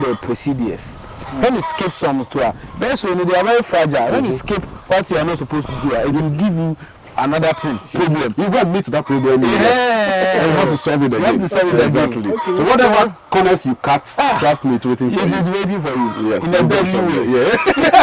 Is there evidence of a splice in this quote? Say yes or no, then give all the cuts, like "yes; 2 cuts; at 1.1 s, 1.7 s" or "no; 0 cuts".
no; 0 cuts